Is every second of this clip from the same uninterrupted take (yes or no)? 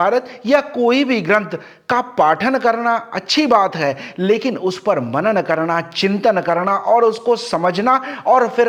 yes